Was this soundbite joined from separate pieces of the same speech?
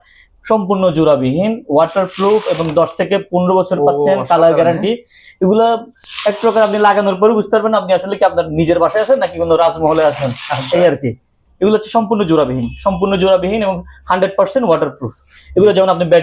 no; 0 cuts

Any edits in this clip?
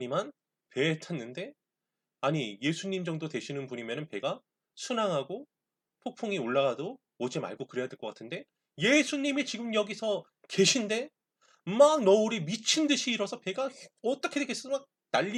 no; 0 cuts

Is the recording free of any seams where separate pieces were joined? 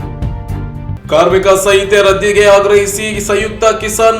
no; 1 cut; at 1.0 s

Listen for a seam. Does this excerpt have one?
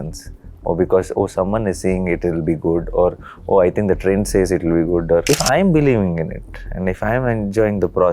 yes; 1 cut; at 5.2 s

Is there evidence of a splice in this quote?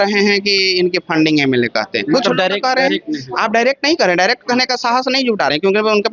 no; 0 cuts

